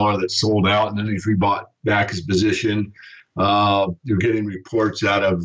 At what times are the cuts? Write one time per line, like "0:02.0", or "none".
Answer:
0:02.2